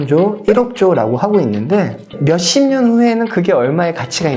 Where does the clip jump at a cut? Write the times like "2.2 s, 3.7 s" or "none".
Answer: 2.1 s